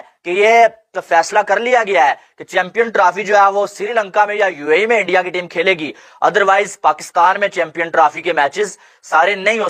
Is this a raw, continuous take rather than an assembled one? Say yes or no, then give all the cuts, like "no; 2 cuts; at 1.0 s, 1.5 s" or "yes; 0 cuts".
yes; 0 cuts